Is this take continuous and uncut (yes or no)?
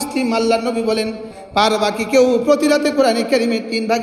no